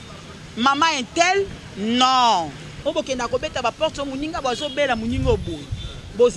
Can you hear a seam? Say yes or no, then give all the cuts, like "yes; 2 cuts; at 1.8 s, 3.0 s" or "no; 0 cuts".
yes; 1 cut; at 2.6 s